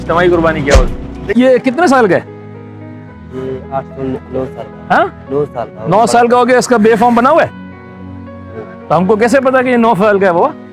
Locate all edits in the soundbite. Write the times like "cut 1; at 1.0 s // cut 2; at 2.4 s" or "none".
cut 1; at 1.2 s